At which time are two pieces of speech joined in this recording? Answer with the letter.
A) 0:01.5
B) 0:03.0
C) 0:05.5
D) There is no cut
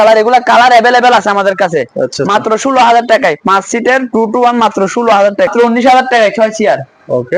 C